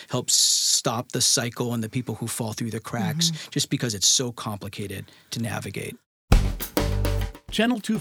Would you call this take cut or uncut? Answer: cut